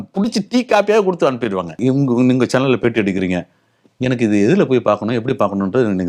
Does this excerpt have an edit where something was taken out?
yes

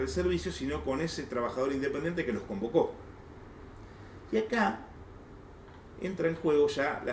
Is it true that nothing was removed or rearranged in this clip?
yes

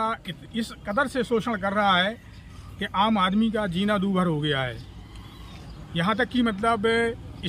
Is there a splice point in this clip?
no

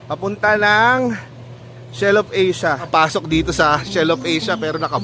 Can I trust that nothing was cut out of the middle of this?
no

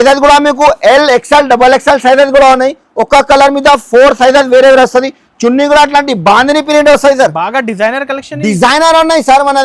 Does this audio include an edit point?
no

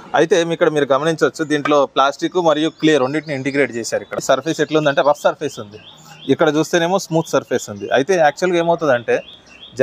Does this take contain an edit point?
no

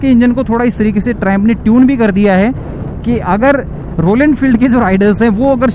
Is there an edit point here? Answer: no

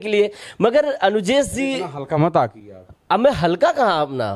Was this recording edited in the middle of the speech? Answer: no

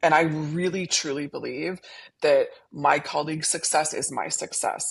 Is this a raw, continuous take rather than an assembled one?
yes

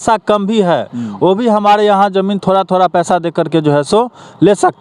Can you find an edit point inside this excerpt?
no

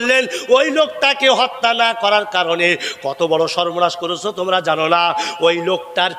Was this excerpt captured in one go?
yes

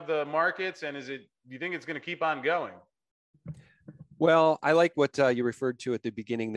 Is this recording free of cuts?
yes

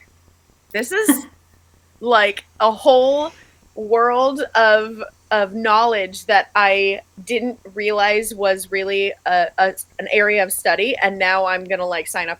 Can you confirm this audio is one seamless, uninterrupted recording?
yes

